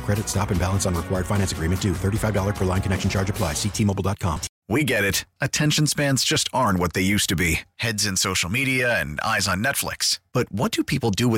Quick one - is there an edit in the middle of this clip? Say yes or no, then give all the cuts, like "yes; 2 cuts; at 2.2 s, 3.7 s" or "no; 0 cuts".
yes; 1 cut; at 4.5 s